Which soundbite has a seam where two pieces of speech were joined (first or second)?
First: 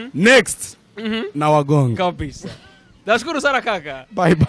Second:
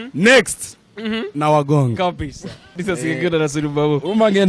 second